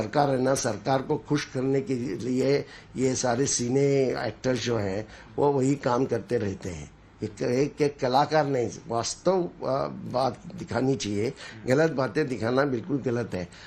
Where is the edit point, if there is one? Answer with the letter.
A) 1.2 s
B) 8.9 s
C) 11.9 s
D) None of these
C